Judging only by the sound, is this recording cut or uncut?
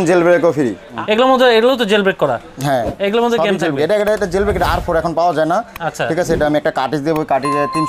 cut